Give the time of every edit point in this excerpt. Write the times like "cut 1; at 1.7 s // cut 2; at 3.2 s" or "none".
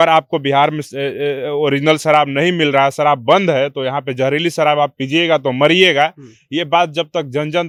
none